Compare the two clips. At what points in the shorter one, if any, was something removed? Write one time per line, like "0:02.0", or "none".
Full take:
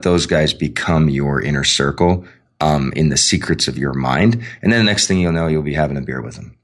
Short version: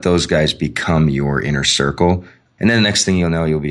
0:02.5

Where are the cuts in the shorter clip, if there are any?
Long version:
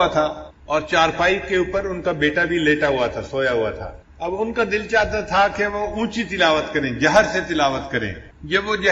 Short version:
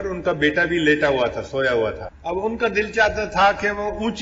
0:02.1

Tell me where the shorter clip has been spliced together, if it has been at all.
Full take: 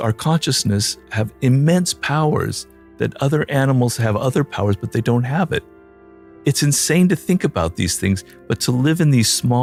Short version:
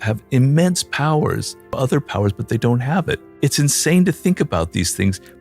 0:01.7
0:03.3

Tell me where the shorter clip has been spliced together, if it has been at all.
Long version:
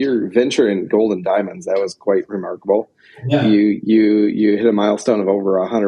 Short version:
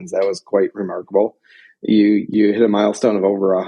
0:02.3

